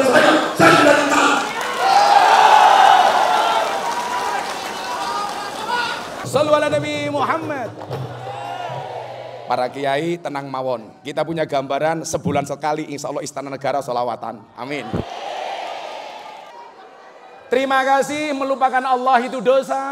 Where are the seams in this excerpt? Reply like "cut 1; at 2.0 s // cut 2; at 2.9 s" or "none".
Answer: cut 1; at 6.2 s // cut 2; at 16.5 s